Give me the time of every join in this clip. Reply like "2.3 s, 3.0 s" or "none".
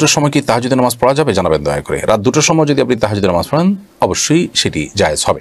none